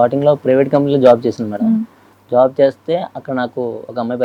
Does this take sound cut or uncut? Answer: uncut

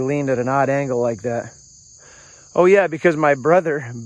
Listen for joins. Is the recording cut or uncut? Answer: uncut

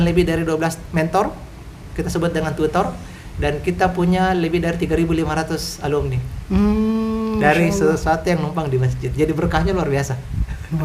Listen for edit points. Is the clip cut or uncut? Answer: uncut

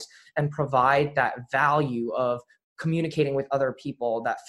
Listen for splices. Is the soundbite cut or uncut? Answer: uncut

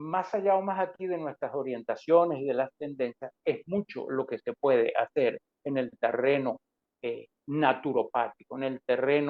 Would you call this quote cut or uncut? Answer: uncut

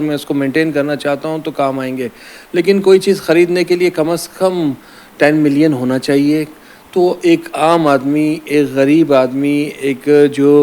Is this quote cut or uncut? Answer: uncut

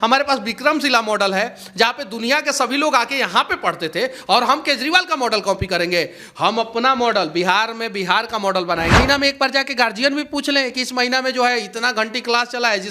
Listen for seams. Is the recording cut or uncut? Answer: cut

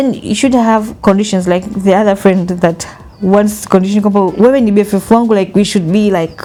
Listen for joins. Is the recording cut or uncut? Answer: uncut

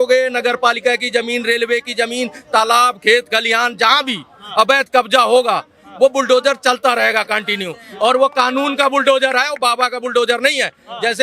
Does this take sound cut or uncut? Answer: uncut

